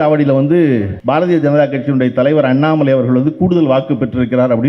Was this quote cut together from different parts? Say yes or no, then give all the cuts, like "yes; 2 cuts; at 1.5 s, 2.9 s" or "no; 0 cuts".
yes; 1 cut; at 0.9 s